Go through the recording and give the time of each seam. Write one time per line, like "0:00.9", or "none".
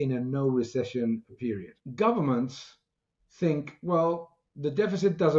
0:01.8